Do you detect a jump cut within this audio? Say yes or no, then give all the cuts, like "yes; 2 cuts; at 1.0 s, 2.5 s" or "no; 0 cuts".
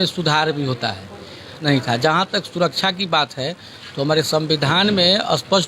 yes; 1 cut; at 1.6 s